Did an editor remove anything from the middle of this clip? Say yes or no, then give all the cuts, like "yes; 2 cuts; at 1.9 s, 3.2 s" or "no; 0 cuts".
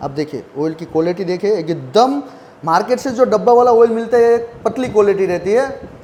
no; 0 cuts